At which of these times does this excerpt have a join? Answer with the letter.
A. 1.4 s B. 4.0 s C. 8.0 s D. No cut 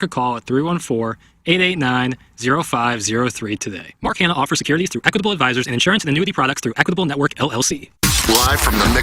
C